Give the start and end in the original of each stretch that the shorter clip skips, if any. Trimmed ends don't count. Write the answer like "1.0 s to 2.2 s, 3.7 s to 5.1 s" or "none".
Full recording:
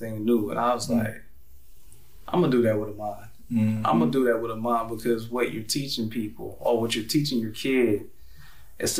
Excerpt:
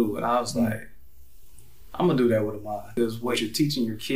3.6 s to 6.8 s